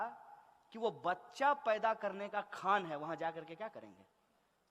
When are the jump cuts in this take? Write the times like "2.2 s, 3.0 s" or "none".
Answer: none